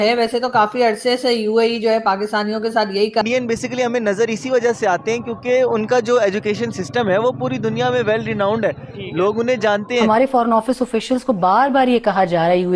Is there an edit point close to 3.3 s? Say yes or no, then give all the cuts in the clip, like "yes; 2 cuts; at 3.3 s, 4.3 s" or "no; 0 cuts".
no; 0 cuts